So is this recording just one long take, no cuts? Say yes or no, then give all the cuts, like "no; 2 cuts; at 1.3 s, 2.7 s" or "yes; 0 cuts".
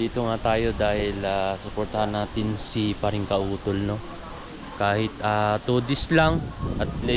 yes; 0 cuts